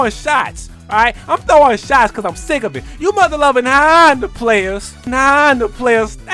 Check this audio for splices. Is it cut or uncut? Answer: uncut